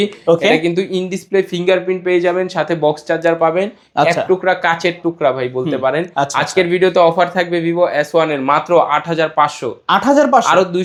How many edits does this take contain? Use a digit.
0